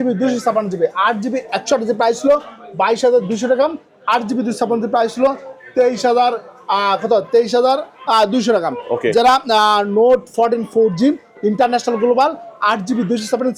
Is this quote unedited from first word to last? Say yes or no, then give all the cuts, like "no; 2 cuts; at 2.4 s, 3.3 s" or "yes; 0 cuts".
yes; 0 cuts